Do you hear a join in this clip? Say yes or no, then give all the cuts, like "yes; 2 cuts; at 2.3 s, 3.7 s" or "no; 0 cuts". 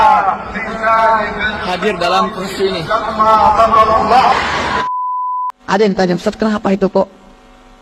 yes; 1 cut; at 5.1 s